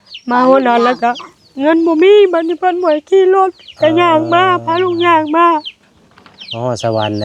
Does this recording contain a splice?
no; 0 cuts

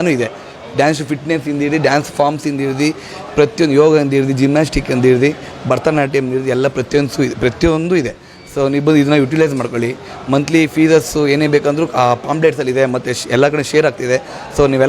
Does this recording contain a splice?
no; 0 cuts

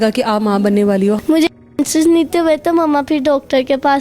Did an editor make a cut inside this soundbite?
yes; 1 cut; at 1.2 s

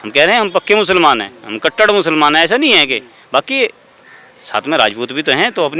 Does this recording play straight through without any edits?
yes; 0 cuts

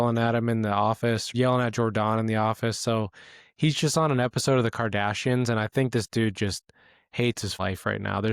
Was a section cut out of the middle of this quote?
yes; 2 cuts; at 1.2 s, 7.6 s

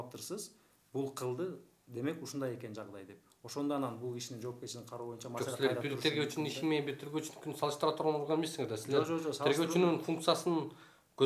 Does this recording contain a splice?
no; 0 cuts

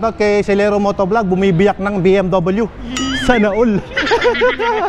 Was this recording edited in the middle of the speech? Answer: no; 0 cuts

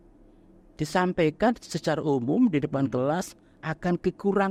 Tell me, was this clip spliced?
no; 0 cuts

